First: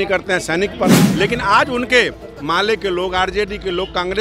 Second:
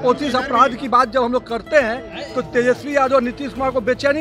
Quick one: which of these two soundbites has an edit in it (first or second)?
first